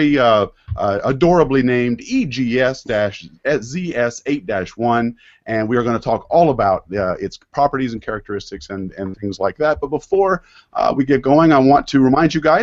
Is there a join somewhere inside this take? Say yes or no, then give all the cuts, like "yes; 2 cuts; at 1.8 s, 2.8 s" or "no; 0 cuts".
yes; 1 cut; at 3.7 s